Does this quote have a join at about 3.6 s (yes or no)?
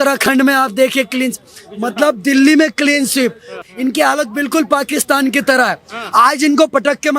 yes